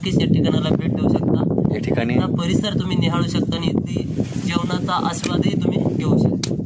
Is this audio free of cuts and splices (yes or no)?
yes